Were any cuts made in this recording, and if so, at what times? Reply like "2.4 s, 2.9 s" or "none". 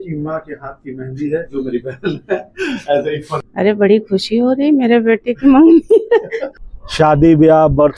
3.4 s, 6.5 s